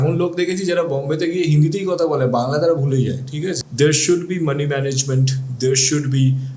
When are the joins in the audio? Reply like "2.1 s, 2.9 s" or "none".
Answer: 3.6 s